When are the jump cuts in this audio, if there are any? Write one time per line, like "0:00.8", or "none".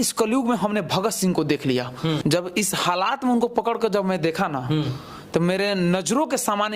0:02.2